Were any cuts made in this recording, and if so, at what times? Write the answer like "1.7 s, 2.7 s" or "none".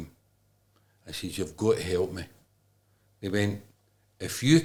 none